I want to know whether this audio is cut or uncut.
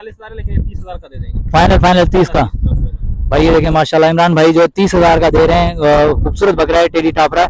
uncut